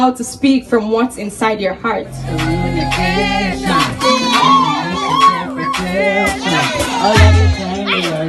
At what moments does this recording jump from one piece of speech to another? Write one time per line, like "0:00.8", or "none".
0:02.2